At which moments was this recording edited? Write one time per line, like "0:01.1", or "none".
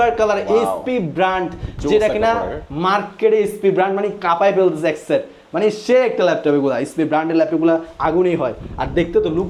none